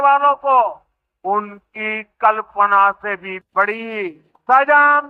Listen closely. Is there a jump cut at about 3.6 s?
no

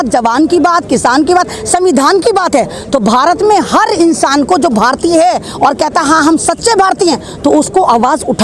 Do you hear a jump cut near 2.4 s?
no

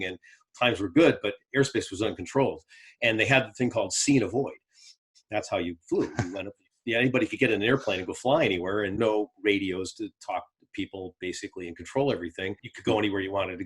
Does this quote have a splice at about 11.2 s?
no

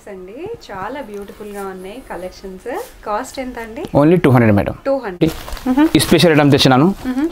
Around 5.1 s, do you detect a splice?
yes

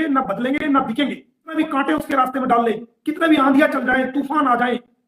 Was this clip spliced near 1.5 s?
yes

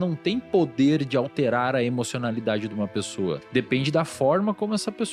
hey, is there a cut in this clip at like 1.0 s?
no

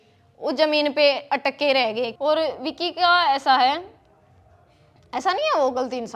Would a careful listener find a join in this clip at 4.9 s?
no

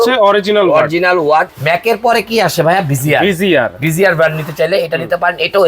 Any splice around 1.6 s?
yes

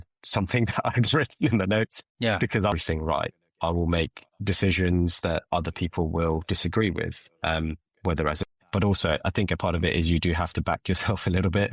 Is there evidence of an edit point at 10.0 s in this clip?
no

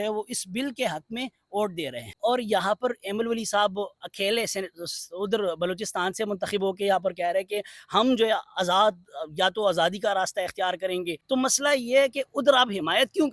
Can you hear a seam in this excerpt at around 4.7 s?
no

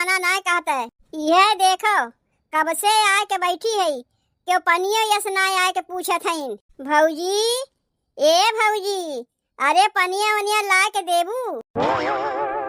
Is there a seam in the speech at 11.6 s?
yes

